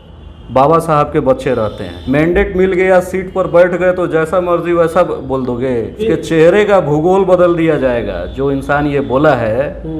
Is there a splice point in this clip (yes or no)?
yes